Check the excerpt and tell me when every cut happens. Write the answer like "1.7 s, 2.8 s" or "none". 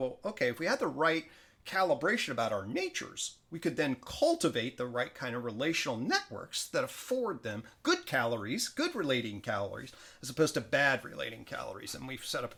none